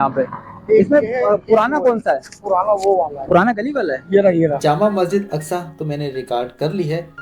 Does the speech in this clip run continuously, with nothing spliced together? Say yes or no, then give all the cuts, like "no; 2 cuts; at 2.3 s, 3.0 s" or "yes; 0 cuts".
no; 1 cut; at 4.6 s